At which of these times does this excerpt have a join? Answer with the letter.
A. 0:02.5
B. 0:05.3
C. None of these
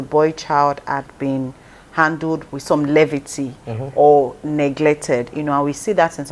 A